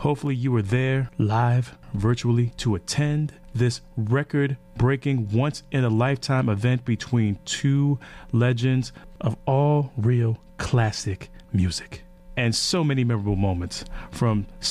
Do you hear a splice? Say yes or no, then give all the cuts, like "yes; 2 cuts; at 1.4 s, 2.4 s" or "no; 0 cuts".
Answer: no; 0 cuts